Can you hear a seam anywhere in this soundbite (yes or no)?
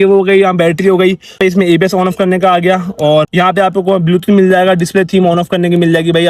yes